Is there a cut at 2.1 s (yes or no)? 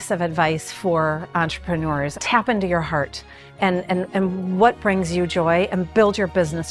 yes